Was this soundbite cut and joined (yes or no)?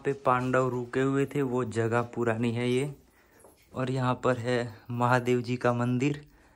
no